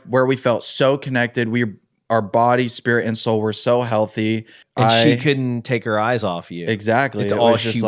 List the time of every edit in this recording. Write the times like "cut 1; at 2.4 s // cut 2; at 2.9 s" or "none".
cut 1; at 4.6 s